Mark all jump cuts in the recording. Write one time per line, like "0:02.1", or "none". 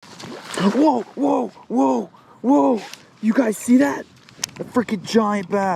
none